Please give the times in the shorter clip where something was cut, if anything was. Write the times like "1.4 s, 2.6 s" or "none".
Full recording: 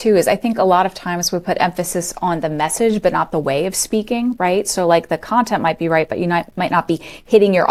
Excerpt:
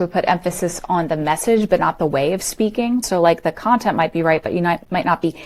3.0 s